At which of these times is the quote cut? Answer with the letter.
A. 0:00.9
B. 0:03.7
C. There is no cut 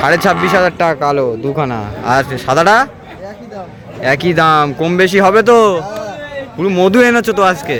C